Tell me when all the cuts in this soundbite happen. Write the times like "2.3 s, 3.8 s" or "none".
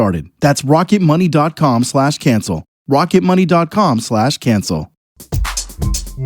5.1 s

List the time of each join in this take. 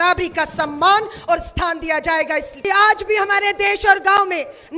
2.5 s

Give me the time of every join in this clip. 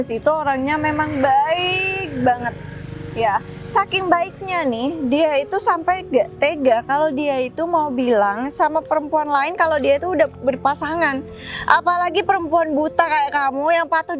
none

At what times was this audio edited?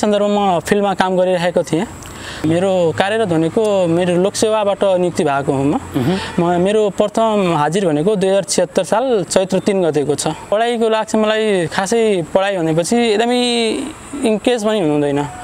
2.4 s, 10.5 s

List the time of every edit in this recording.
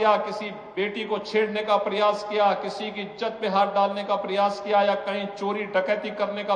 none

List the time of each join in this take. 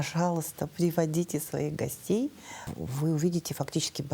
2.7 s

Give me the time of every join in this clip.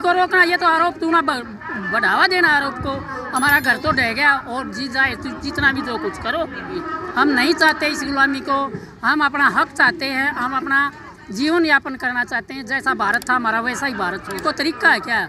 6.8 s, 14.4 s

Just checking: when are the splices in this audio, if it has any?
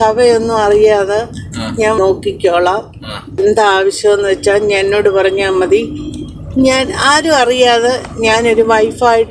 none

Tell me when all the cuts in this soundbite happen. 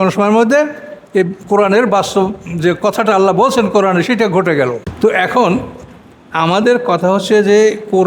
4.9 s

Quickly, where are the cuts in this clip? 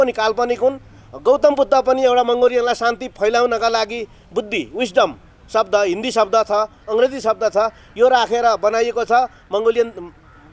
none

